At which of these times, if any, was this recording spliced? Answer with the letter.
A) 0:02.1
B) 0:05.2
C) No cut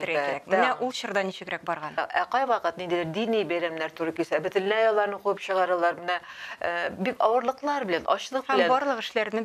A